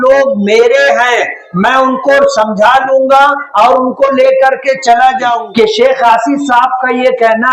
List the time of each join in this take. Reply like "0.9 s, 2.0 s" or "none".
5.4 s